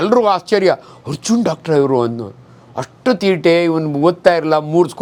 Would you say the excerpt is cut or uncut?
uncut